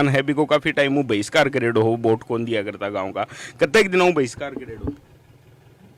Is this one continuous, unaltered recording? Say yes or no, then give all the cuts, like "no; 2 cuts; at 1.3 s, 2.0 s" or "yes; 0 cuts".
yes; 0 cuts